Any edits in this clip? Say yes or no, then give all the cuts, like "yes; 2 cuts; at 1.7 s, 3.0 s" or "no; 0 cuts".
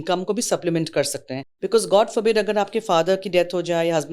yes; 1 cut; at 1.5 s